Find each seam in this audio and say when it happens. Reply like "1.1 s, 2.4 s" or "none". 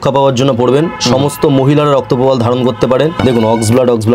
3.2 s